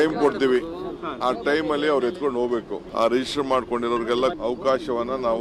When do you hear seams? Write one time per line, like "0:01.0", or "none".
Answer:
none